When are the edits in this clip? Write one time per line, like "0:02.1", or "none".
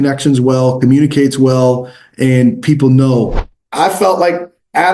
0:03.4